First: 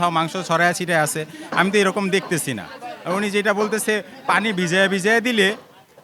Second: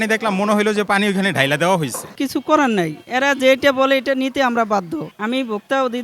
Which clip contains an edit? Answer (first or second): second